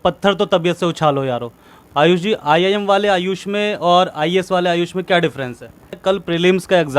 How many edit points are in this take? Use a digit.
2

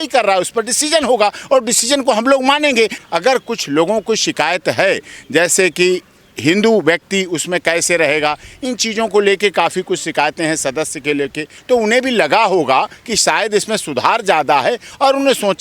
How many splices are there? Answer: 2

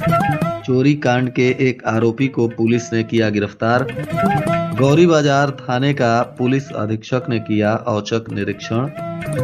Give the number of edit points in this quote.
0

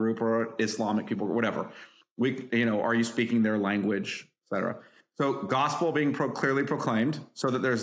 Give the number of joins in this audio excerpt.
0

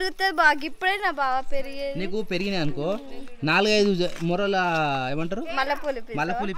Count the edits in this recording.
0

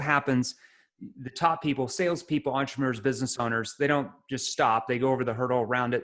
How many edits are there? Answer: 0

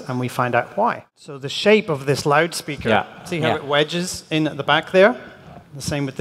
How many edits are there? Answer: 1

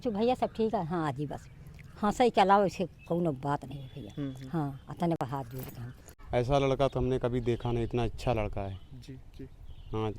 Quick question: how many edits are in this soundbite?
1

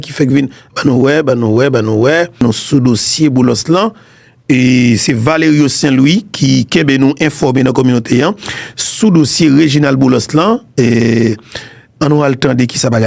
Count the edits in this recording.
1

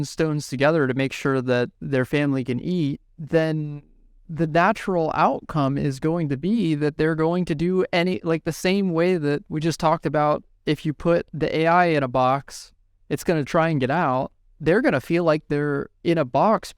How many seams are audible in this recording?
1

